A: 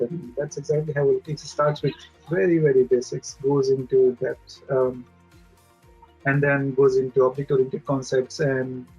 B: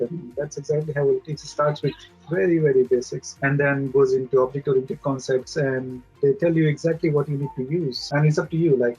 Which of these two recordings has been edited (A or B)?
B